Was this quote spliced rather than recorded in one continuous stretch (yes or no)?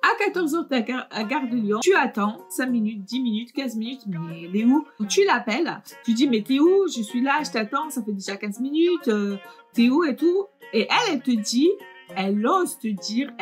yes